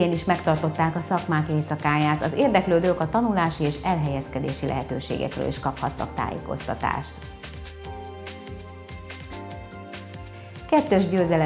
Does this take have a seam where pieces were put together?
no; 0 cuts

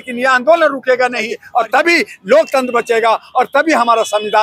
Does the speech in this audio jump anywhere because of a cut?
yes; 1 cut; at 1.4 s

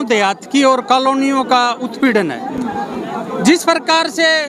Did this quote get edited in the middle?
no; 0 cuts

